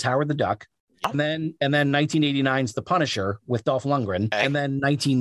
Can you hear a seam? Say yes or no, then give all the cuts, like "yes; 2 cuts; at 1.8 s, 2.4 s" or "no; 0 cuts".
yes; 2 cuts; at 1.0 s, 4.3 s